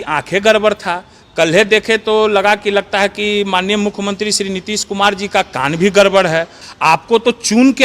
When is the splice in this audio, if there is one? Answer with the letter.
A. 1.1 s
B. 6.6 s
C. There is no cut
B